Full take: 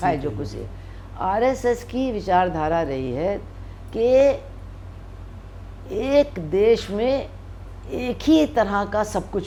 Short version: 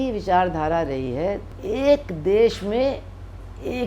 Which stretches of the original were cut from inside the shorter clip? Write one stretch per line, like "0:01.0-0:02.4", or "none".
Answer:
0:03.5-0:05.8